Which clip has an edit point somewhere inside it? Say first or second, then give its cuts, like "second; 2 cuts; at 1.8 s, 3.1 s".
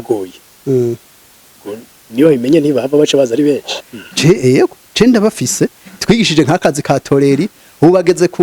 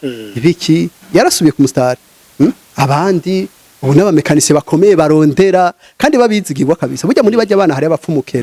first; 1 cut; at 3.8 s